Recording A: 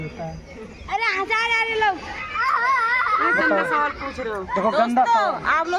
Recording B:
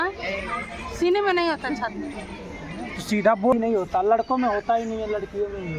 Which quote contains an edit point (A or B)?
B